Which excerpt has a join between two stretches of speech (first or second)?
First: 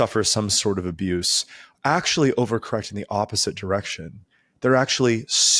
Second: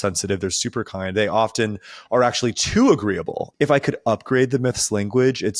second